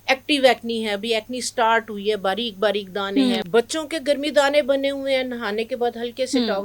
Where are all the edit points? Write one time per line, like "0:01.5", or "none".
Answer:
0:03.4